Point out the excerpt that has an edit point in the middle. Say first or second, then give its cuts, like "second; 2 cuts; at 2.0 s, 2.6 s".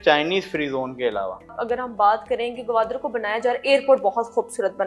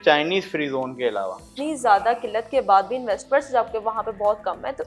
second; 1 cut; at 1.4 s